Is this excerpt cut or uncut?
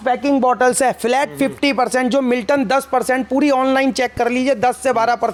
uncut